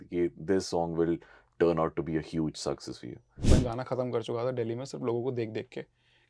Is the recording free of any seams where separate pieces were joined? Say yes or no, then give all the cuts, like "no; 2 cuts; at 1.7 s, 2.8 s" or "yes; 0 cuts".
no; 1 cut; at 3.3 s